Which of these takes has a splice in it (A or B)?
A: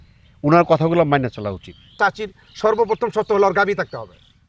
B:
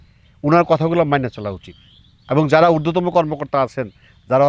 A